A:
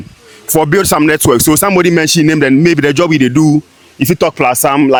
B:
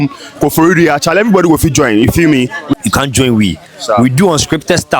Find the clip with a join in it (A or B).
B